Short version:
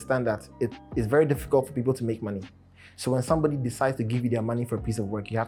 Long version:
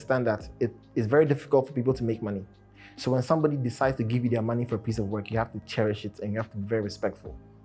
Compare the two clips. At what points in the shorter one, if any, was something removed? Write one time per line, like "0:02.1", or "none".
none